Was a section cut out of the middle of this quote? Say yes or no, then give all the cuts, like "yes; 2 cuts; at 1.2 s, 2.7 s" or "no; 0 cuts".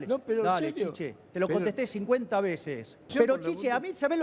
yes; 1 cut; at 3.1 s